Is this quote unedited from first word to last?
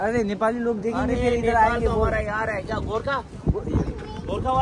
yes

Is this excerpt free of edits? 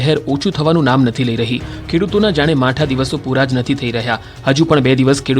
no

